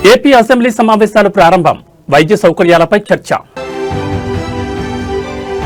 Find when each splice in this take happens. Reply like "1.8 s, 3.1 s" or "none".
none